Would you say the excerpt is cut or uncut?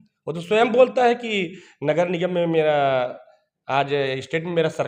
uncut